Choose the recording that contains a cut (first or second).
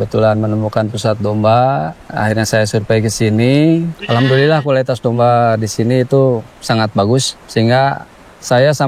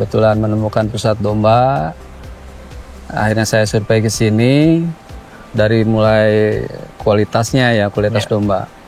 first